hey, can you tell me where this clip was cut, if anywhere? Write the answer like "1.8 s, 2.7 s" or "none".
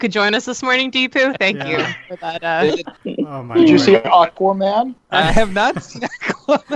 3.0 s, 5.0 s